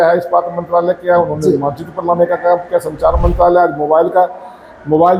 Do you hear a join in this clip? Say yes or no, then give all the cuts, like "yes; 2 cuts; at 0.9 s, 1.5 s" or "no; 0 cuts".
no; 0 cuts